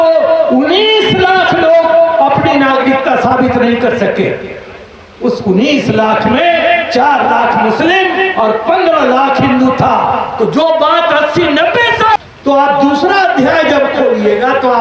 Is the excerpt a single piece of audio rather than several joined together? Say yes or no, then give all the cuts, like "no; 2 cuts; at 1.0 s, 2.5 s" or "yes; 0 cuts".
no; 1 cut; at 12.2 s